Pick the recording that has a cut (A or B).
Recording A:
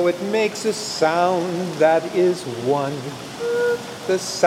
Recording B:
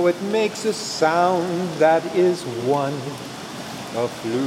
B